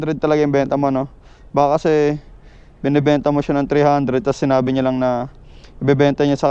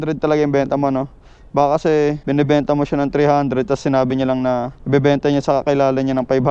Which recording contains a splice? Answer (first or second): second